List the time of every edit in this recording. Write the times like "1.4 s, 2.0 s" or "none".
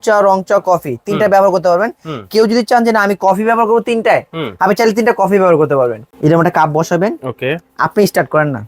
6.0 s